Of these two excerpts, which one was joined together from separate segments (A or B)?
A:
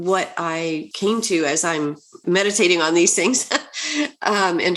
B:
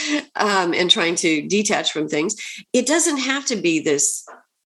A